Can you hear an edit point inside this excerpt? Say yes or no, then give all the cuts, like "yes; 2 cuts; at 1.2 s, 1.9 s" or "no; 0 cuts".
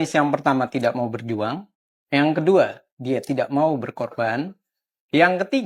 no; 0 cuts